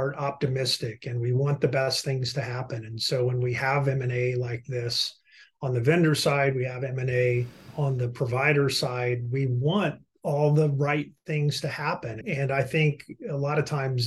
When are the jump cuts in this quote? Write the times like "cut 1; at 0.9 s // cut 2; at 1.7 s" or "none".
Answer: none